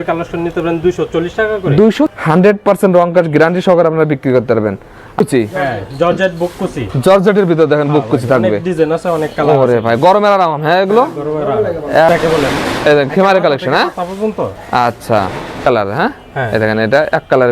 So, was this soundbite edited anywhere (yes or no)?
yes